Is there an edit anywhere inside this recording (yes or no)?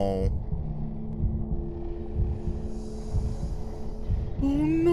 no